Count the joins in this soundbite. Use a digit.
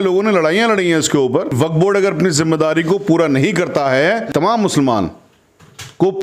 2